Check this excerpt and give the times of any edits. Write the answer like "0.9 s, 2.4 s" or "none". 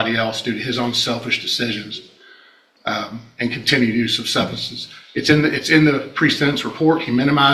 none